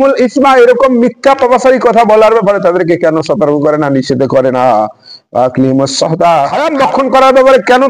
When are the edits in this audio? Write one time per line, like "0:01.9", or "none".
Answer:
0:06.6